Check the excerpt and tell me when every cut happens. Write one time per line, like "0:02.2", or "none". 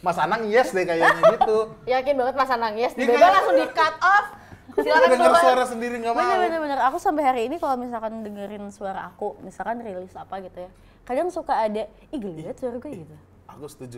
none